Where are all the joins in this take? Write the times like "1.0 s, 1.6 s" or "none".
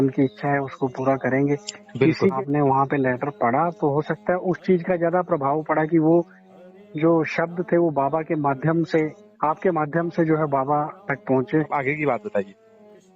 2.3 s, 11.7 s